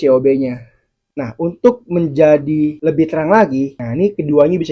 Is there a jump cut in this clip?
yes; 2 cuts; at 2.8 s, 3.8 s

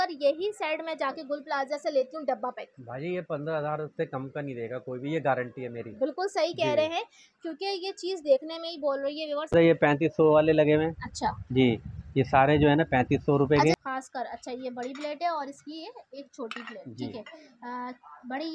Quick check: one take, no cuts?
no; 2 cuts; at 9.5 s, 13.8 s

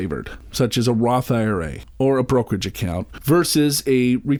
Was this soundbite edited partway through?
no; 0 cuts

